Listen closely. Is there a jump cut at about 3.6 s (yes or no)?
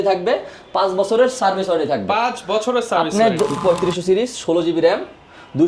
yes